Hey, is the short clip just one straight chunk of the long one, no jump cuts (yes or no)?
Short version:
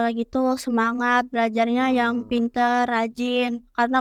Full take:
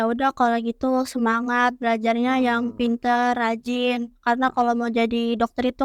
yes